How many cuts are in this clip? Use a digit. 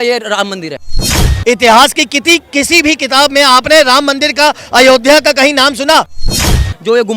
2